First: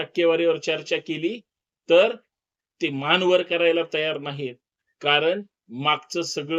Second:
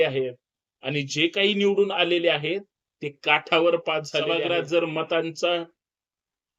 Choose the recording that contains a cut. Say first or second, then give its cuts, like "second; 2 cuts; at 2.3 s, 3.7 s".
second; 1 cut; at 4.3 s